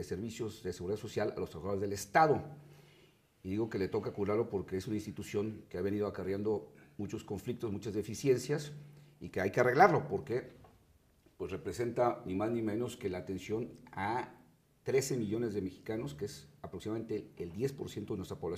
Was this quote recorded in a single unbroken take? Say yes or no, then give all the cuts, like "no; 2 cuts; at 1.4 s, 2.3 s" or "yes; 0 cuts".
yes; 0 cuts